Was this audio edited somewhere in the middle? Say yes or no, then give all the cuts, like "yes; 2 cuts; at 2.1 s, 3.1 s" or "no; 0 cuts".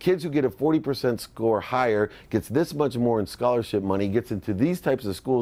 no; 0 cuts